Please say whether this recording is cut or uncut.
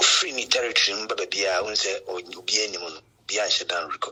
uncut